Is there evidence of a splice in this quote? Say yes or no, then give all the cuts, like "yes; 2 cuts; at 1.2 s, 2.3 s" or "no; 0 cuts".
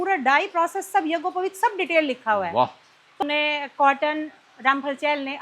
yes; 1 cut; at 3.2 s